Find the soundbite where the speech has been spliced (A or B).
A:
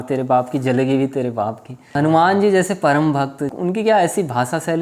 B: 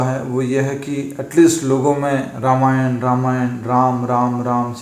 A